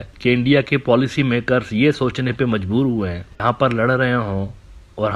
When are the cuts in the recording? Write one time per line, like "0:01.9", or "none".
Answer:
0:03.4